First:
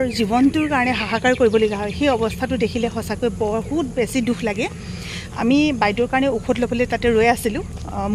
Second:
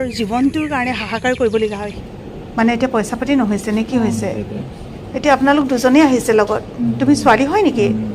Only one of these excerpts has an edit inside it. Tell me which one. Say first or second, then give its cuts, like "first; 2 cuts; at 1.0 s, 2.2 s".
second; 2 cuts; at 1.9 s, 4.6 s